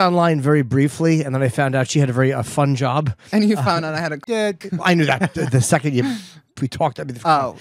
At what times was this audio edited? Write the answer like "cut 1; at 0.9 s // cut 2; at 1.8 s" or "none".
none